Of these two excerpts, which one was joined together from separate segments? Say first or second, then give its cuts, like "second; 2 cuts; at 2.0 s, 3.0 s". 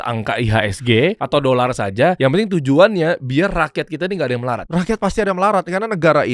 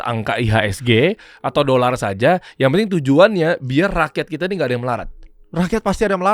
first; 3 cuts; at 1.2 s, 2.2 s, 4.6 s